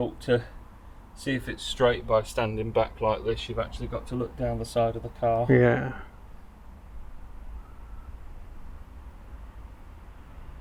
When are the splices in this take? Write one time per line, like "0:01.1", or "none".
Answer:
none

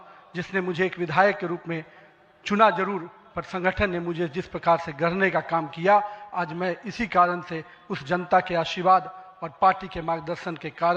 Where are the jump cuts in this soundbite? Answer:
none

